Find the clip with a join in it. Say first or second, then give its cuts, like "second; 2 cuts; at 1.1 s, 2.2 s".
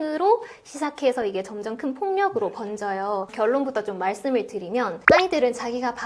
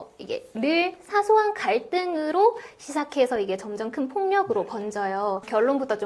first; 1 cut; at 5.0 s